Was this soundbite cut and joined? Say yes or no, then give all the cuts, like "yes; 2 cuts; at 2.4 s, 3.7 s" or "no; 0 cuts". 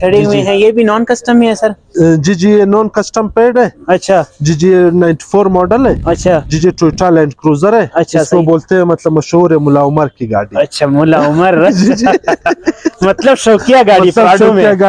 no; 0 cuts